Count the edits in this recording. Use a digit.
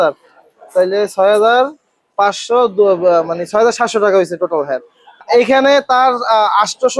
0